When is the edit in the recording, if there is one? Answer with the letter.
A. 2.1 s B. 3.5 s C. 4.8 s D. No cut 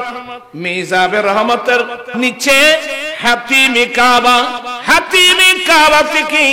A